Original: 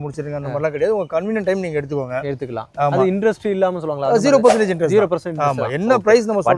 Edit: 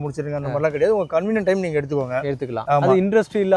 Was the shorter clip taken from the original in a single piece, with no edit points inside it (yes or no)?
no